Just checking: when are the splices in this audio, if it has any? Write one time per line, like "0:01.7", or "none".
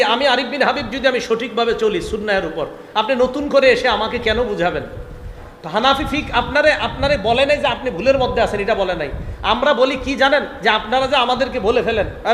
0:05.4

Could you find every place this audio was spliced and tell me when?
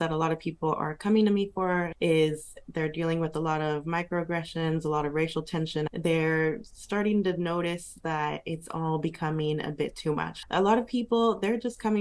0:01.9
0:05.9
0:10.3

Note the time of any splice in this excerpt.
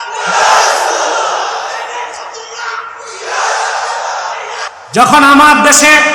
0:04.7

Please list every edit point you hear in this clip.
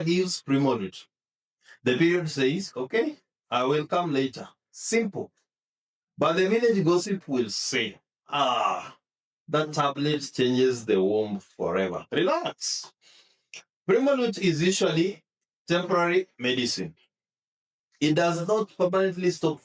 none

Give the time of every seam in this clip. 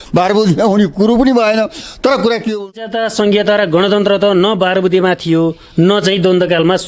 0:02.7

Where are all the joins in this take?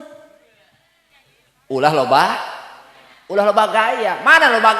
0:01.0

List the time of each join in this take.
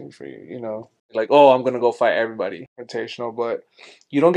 0:01.1
0:02.6

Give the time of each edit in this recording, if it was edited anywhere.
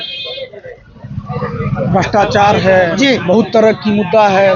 none

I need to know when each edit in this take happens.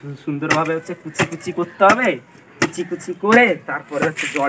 none

